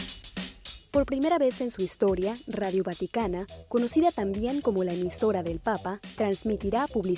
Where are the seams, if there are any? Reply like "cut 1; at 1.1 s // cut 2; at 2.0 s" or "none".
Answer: cut 1; at 0.9 s